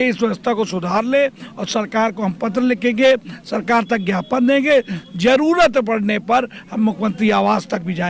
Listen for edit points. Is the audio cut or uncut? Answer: uncut